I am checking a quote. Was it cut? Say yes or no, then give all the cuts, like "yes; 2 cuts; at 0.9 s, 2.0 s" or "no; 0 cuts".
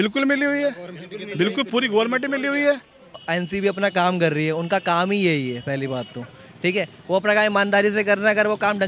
yes; 1 cut; at 3.2 s